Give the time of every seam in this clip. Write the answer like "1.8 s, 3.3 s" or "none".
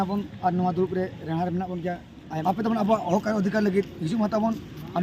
2.3 s